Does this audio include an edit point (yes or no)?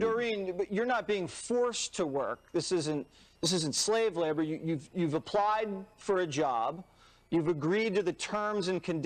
no